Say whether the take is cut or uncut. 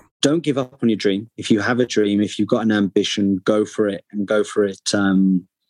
cut